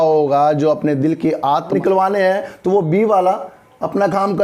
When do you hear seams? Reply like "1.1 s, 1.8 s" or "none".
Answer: 1.7 s